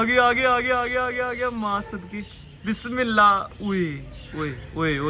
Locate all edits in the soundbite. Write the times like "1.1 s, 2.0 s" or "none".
none